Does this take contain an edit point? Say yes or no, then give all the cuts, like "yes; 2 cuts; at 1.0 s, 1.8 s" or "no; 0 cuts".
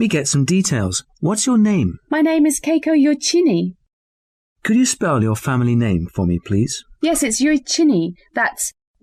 no; 0 cuts